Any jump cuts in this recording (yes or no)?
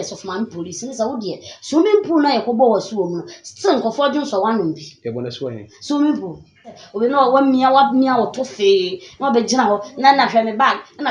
yes